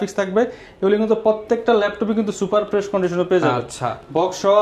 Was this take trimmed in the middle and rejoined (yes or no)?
no